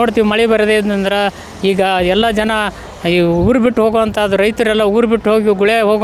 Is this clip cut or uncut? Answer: uncut